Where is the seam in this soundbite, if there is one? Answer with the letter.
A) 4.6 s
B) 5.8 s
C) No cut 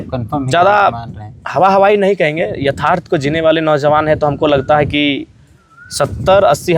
C